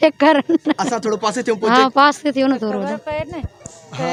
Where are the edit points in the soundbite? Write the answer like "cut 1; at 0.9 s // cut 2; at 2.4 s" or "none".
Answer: none

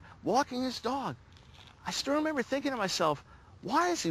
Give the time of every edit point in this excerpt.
none

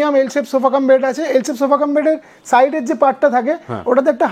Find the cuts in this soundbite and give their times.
none

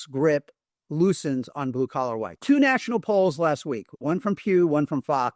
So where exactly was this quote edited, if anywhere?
cut 1; at 2.3 s

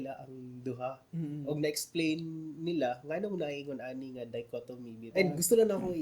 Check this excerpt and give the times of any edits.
cut 1; at 5.0 s

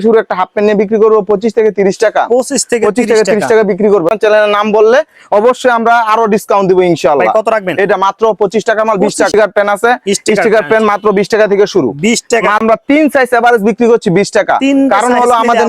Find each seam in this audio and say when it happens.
cut 1; at 4.1 s // cut 2; at 9.3 s // cut 3; at 12.6 s

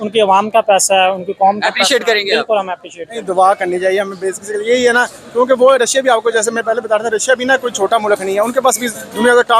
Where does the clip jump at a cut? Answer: cut 1; at 3.3 s

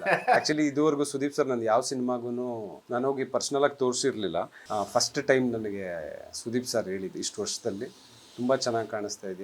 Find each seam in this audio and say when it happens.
cut 1; at 2.7 s // cut 2; at 4.6 s

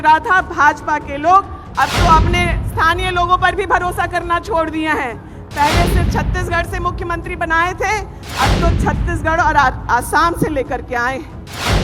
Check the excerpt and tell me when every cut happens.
none

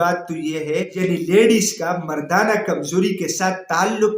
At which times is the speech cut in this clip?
cut 1; at 0.9 s

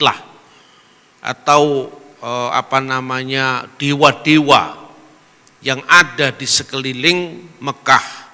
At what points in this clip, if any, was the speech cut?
none

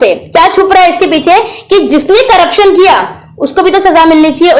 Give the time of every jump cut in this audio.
none

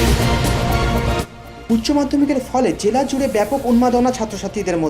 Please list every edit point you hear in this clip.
none

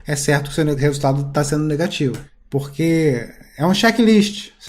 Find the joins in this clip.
cut 1; at 0.8 s // cut 2; at 2.3 s

